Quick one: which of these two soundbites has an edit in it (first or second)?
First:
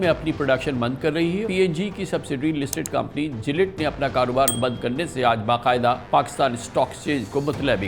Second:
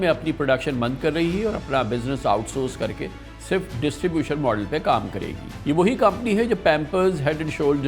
first